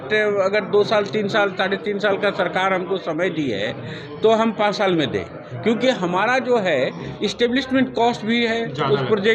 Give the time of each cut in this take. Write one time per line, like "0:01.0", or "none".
none

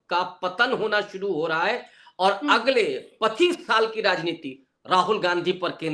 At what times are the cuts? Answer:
none

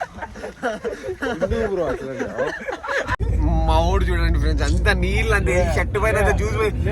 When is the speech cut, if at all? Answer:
0:03.2

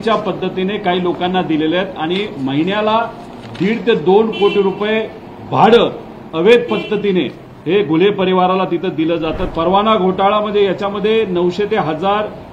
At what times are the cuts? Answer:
0:09.4

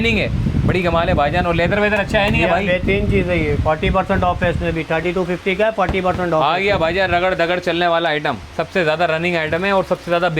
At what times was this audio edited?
none

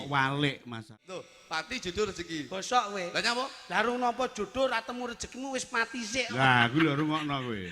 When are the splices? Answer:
0:00.9

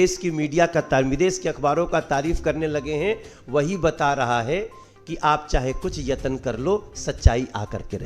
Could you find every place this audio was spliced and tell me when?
none

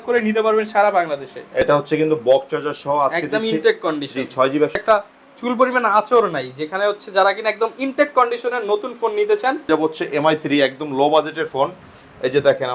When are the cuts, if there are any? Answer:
0:01.7
0:04.7
0:09.7

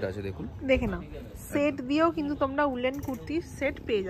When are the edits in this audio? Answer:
none

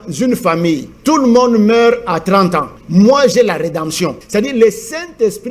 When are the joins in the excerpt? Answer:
0:00.9
0:02.7
0:04.2

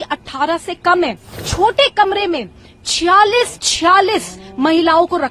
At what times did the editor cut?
0:01.4

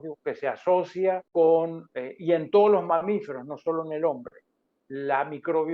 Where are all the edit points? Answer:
0:01.2

